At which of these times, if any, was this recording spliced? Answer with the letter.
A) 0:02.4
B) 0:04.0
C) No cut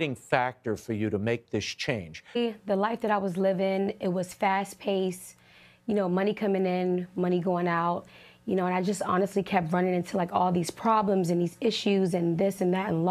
A